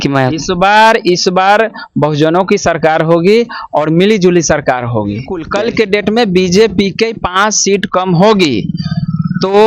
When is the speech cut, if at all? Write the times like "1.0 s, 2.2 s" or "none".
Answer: 5.5 s